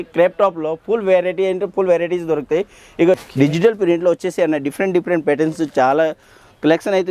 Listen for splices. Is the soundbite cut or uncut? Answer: cut